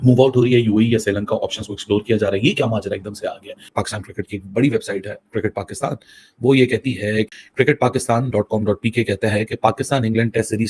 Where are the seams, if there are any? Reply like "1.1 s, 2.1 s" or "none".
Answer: none